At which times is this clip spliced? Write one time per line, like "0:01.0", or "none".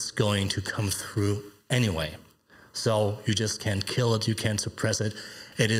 none